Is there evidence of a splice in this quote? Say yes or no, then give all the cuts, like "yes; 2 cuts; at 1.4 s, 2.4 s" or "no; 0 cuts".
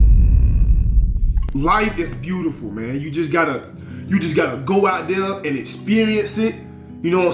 yes; 1 cut; at 1.4 s